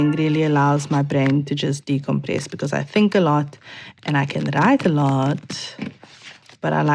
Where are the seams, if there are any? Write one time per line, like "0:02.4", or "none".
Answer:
none